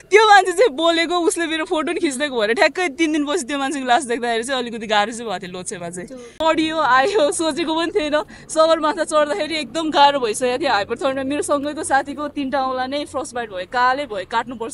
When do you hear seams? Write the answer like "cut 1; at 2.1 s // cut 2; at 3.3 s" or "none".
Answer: cut 1; at 6.2 s

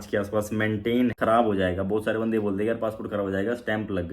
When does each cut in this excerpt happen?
cut 1; at 1.2 s

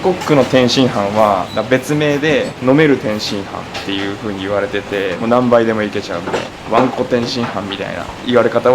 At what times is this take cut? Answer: cut 1; at 1.5 s // cut 2; at 2.5 s // cut 3; at 5.2 s // cut 4; at 6.5 s

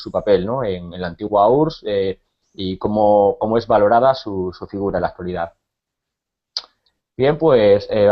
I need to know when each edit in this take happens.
cut 1; at 3.9 s

